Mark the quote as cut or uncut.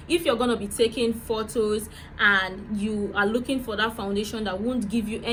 uncut